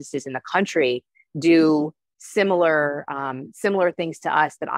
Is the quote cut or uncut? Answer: uncut